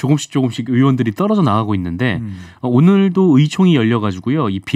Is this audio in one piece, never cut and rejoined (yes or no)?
yes